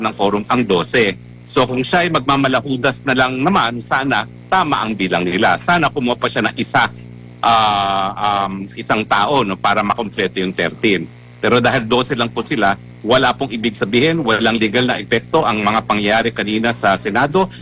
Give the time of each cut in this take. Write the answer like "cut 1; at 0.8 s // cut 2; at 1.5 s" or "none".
none